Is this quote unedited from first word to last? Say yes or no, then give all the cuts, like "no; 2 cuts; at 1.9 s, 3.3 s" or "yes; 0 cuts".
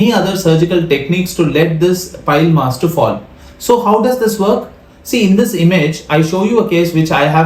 yes; 0 cuts